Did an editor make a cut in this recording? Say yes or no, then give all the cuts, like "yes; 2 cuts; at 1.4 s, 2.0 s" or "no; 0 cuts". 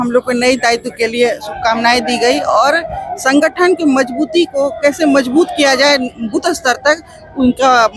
no; 0 cuts